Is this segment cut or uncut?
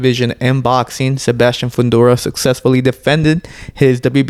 uncut